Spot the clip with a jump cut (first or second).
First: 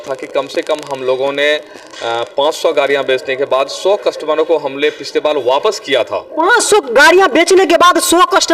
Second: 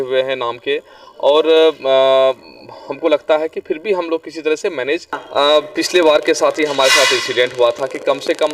second